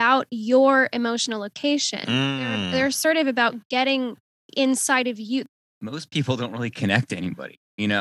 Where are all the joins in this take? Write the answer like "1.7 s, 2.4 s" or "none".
5.4 s